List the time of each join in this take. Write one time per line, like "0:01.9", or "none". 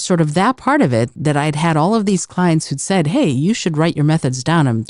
0:01.1